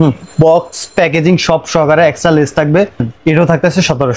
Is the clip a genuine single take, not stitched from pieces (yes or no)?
no